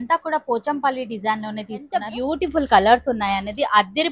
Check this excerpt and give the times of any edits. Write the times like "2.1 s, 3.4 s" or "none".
2.1 s